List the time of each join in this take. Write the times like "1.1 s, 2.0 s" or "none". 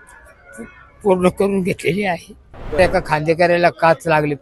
2.8 s